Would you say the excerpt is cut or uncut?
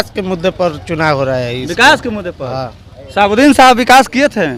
uncut